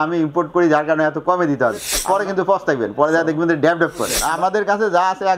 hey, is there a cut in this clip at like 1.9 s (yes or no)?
yes